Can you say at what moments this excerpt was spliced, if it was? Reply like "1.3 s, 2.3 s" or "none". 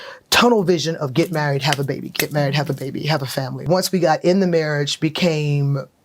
3.6 s